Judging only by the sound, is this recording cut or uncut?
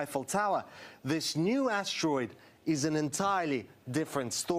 uncut